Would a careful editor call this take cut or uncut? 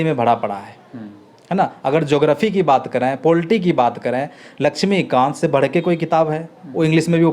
uncut